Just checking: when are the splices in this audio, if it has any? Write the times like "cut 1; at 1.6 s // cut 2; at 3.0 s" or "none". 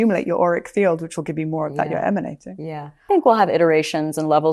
none